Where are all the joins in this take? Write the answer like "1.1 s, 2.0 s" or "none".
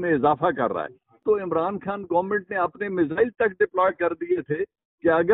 1.2 s